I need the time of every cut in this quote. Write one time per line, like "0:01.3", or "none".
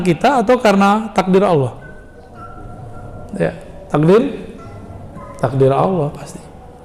none